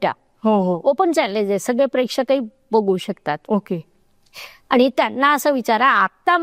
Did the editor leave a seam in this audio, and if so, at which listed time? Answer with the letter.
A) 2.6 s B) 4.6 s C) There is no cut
C